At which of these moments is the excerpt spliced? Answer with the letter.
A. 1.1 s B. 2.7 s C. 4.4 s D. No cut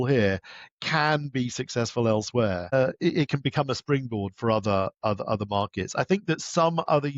B